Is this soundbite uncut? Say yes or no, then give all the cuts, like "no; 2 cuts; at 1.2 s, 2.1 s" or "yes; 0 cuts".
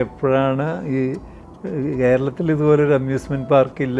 yes; 0 cuts